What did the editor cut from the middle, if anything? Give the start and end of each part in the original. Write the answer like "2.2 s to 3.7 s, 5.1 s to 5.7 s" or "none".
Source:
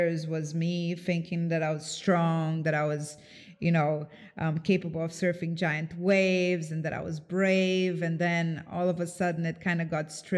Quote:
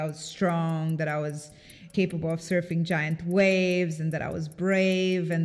3.5 s to 4.6 s